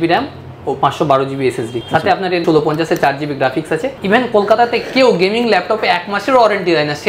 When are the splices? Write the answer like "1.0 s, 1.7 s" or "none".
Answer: 2.2 s, 3.9 s